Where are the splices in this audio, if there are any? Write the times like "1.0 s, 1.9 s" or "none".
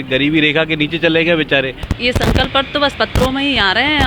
1.9 s